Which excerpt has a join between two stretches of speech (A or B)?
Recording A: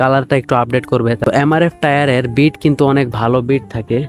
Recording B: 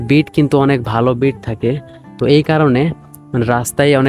A